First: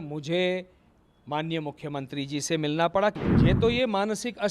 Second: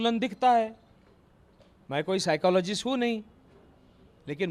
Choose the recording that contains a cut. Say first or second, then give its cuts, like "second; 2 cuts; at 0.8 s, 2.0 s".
first; 1 cut; at 3.2 s